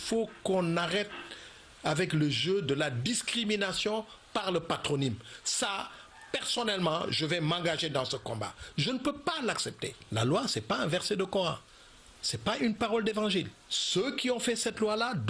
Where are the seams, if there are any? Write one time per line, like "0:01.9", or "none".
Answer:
0:09.4